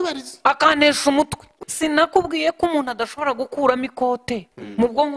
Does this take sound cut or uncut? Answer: cut